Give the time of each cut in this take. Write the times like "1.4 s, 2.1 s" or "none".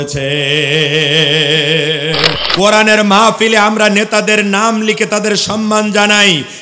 2.4 s